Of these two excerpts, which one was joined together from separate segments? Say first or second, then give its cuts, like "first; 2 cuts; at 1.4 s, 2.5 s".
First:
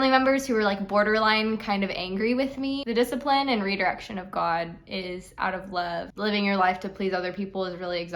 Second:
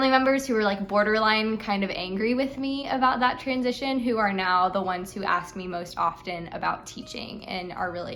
first; 2 cuts; at 2.8 s, 6.1 s